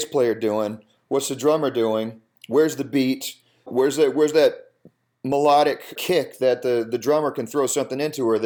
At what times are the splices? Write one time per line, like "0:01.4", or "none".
0:03.7
0:05.9